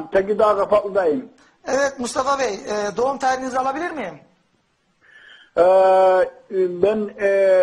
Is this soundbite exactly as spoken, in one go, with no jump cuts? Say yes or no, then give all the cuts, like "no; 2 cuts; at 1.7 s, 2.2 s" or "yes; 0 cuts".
no; 1 cut; at 6.2 s